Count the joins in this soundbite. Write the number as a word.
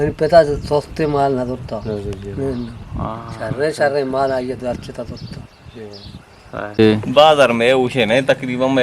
one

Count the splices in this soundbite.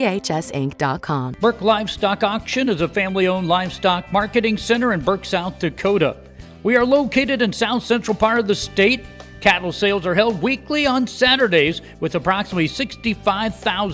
one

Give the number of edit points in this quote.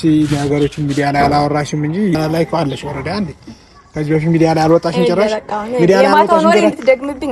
one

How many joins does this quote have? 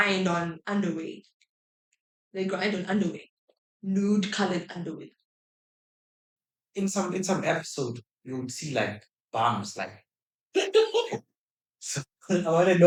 zero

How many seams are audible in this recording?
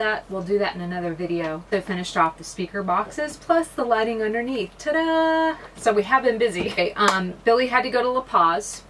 two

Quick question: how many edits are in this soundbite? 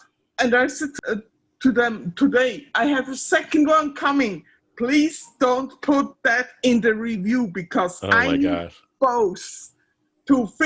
one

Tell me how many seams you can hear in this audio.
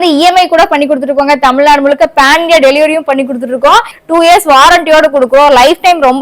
one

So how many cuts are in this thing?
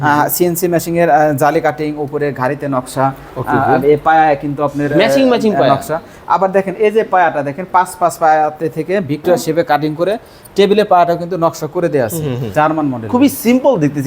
one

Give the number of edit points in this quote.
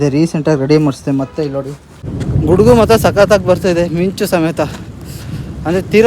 one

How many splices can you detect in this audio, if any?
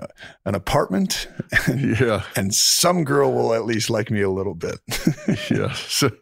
zero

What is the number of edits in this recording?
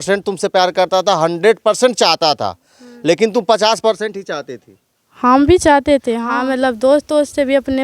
one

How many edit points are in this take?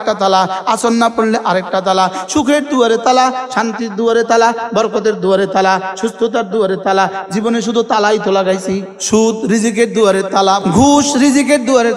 two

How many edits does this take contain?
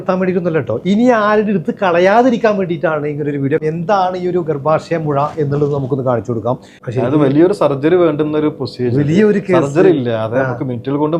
one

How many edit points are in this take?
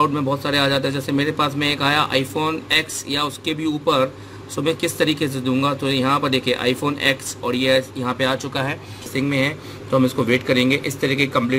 one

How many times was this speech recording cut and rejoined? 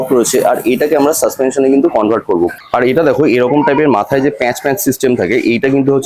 one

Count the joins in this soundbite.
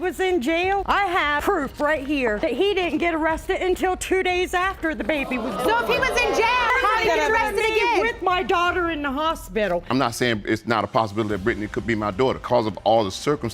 four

